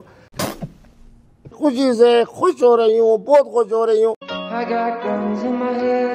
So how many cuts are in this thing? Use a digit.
1